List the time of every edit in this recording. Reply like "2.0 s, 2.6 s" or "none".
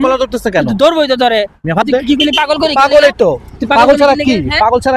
1.8 s